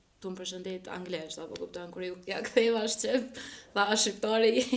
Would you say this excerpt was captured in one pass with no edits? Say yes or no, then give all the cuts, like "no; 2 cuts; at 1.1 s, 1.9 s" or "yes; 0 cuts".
yes; 0 cuts